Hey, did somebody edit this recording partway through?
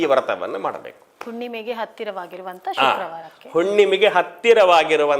no; 0 cuts

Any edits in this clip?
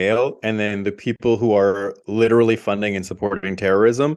no; 0 cuts

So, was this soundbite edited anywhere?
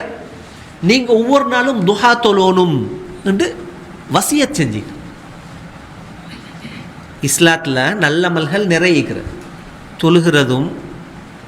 no; 0 cuts

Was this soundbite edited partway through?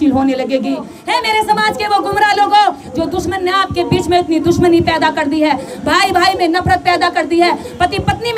yes; 1 cut; at 0.9 s

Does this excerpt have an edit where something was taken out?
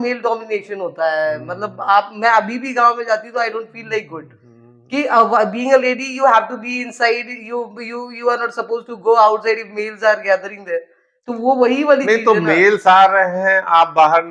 no; 0 cuts

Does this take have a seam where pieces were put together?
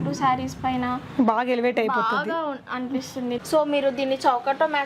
yes; 1 cut; at 3.4 s

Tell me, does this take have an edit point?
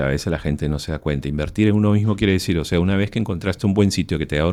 no; 0 cuts

